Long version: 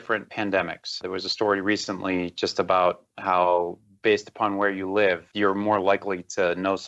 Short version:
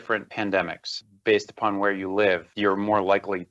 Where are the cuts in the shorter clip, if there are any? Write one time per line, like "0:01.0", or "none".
0:01.1